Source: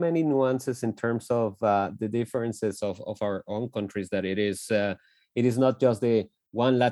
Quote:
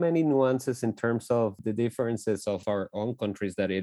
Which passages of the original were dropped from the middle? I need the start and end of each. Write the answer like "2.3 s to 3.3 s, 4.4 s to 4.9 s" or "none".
1.6 s to 1.9 s, 3.0 s to 3.2 s